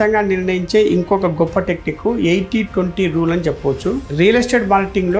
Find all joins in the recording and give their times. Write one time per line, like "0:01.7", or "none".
0:04.0